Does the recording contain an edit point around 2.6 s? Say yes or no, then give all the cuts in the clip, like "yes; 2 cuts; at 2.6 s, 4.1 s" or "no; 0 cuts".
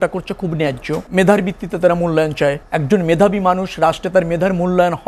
yes; 2 cuts; at 1.1 s, 2.6 s